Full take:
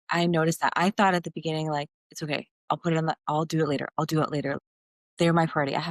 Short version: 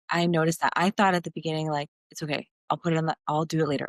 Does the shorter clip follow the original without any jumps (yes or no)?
yes